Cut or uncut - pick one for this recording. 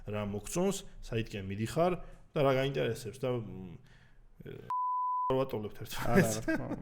uncut